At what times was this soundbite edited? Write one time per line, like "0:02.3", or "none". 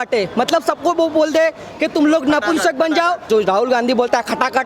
0:03.2